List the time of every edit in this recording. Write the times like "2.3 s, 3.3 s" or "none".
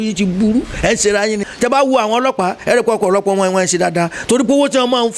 1.5 s